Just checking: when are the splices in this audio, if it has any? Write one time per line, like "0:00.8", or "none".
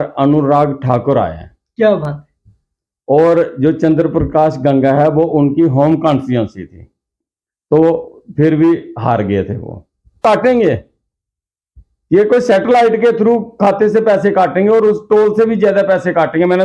0:10.2